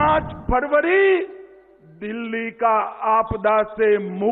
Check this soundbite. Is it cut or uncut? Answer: uncut